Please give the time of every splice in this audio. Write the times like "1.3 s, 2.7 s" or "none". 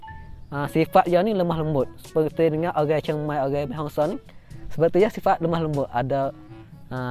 none